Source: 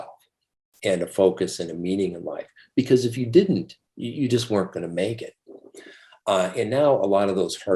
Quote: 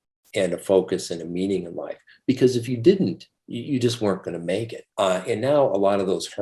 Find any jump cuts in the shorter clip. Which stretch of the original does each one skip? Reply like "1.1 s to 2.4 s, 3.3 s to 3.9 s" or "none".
5.3 s to 6.1 s

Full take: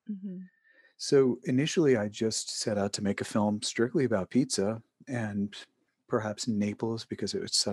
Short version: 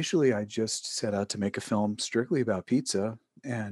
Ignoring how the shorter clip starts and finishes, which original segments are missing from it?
none

